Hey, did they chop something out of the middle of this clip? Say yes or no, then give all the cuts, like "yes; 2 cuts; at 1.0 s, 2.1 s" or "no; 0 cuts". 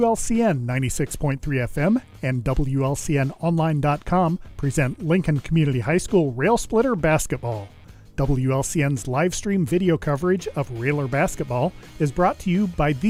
no; 0 cuts